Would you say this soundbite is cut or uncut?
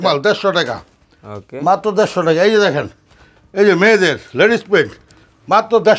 uncut